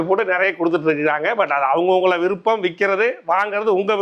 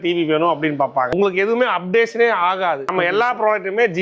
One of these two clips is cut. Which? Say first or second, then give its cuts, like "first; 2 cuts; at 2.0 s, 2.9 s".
second; 2 cuts; at 1.1 s, 2.9 s